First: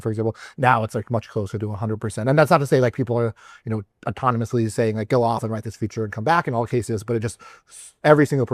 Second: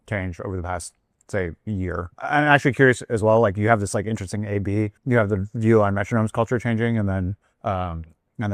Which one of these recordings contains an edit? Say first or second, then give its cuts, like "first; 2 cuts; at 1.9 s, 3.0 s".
second; 3 cuts; at 2.1 s, 5.0 s, 7.5 s